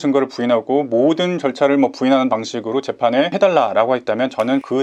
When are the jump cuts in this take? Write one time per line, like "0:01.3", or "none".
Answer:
none